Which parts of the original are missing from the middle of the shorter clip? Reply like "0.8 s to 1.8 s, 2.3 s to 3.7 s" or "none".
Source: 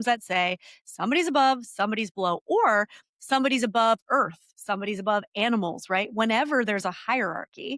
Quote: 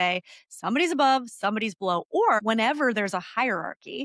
2.7 s to 6.1 s